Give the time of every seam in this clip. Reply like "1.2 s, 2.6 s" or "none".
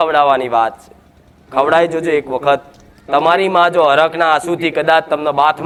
none